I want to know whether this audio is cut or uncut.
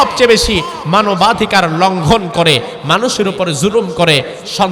uncut